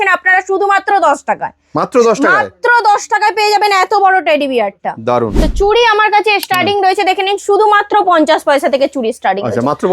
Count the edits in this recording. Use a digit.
1